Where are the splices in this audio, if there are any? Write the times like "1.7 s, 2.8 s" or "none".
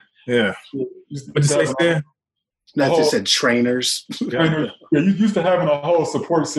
none